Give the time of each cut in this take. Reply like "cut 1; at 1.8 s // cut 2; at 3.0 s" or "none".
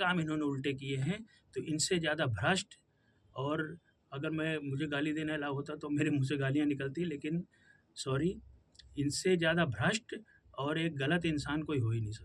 none